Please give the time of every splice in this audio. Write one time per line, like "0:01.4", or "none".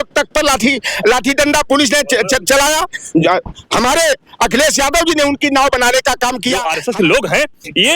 0:06.7